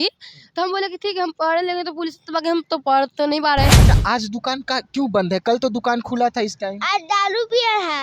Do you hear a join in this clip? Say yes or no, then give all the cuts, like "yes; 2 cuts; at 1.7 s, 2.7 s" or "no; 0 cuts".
yes; 1 cut; at 3.8 s